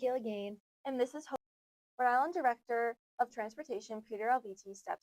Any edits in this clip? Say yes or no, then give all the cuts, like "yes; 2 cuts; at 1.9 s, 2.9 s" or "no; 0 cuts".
yes; 1 cut; at 1.4 s